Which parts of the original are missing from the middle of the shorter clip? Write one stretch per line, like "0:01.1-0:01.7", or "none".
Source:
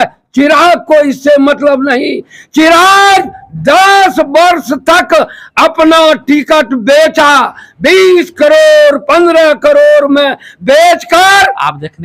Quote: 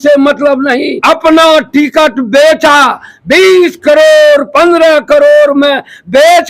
0:02.1-0:05.5